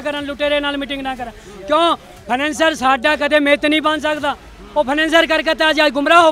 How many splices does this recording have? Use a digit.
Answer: 0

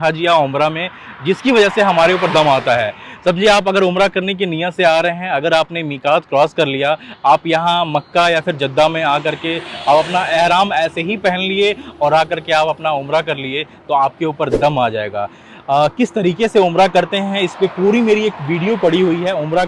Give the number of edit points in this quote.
0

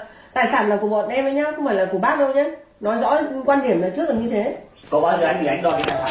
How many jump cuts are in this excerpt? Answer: 0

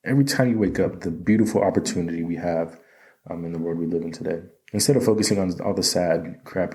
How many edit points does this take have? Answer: 0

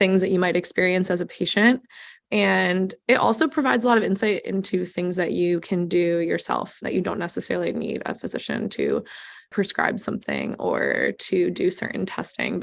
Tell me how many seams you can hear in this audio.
2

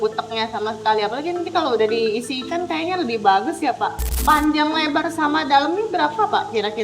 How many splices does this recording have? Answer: 1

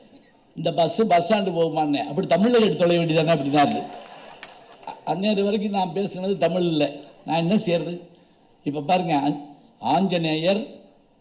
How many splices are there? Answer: 0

